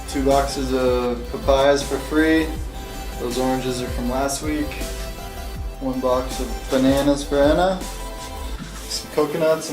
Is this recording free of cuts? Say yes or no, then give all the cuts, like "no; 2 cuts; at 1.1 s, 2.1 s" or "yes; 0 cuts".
no; 1 cut; at 7.7 s